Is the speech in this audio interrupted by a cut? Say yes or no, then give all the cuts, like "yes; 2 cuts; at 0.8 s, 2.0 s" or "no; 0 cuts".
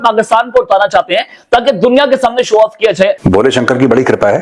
yes; 1 cut; at 3.2 s